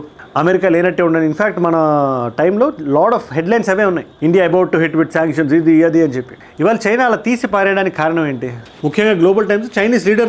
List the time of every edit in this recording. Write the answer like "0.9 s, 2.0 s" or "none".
none